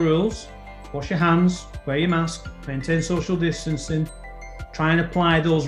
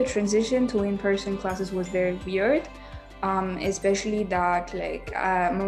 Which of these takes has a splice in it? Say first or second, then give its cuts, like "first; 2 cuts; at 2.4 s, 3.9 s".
first; 1 cut; at 4.5 s